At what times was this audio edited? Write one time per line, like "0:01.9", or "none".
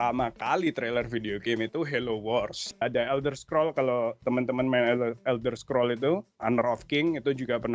0:02.8
0:06.4